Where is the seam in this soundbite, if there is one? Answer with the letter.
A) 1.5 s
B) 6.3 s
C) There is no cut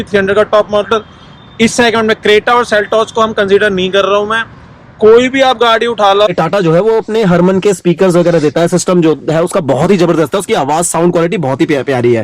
B